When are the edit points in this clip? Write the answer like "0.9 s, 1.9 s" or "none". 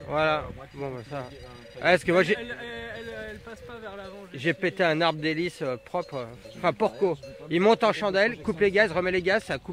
none